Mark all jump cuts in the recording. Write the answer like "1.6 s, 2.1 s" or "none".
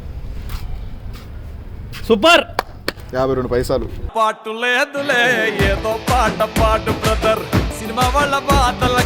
none